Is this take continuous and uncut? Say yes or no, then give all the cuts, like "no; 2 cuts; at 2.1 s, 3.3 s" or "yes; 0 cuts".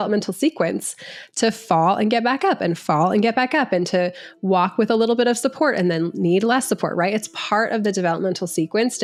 yes; 0 cuts